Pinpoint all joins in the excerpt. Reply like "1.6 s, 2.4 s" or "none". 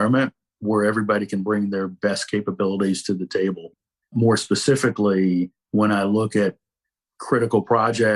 none